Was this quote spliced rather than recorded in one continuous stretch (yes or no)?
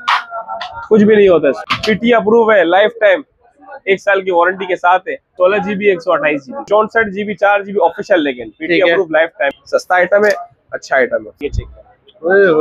yes